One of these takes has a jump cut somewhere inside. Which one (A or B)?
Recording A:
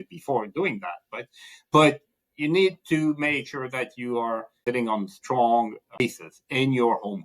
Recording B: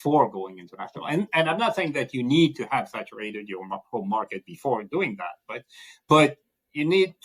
A